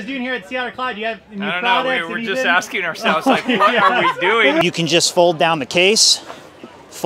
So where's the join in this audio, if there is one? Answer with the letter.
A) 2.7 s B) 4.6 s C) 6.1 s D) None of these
B